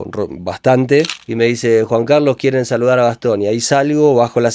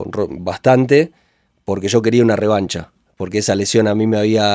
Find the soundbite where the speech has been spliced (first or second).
first